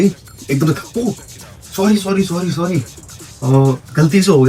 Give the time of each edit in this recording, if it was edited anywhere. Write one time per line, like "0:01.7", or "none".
none

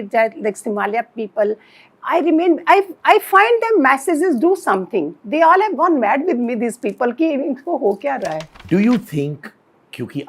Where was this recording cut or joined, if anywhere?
0:08.5

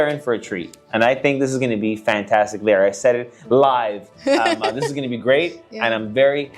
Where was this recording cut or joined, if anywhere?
none

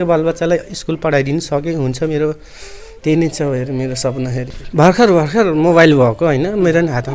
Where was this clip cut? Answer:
0:04.6

